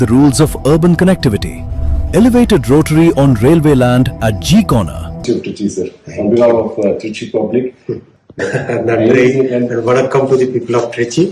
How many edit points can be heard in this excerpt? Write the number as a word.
two